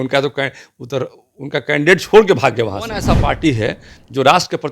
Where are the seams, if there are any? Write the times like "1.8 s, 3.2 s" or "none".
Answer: 3.0 s